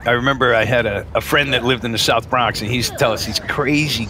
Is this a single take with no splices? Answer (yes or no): no